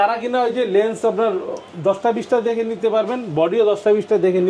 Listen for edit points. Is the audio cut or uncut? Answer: uncut